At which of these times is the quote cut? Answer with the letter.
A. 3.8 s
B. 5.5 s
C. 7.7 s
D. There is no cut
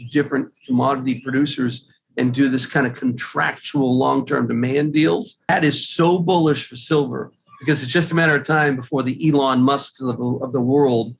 B